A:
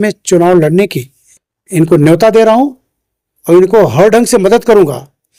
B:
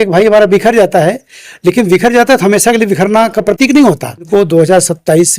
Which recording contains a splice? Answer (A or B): B